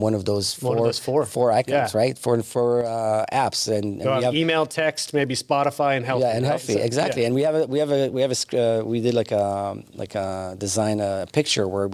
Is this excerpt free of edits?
yes; 0 cuts

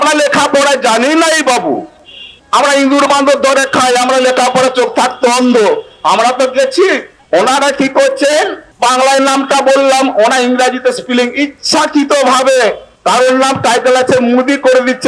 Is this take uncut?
yes; 0 cuts

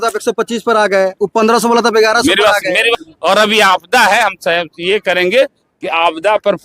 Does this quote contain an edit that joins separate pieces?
yes; 1 cut; at 2.9 s

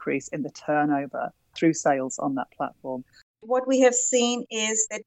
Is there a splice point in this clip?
yes; 2 cuts; at 1.7 s, 3.2 s

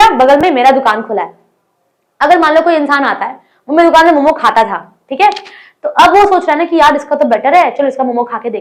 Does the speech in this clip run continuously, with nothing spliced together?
yes; 0 cuts

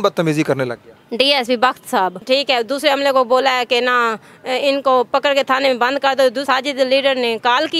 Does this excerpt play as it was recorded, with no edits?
no; 2 cuts; at 2.2 s, 6.4 s

